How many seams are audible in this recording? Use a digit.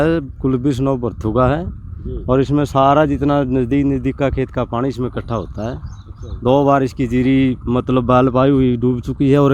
0